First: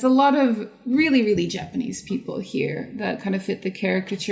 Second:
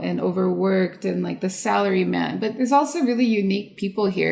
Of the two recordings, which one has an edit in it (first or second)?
second